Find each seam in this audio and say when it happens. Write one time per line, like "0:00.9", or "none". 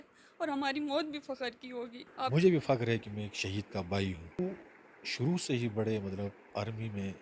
0:02.3
0:04.4